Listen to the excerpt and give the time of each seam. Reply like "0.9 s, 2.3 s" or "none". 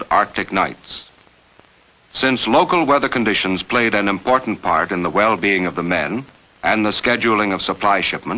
4.3 s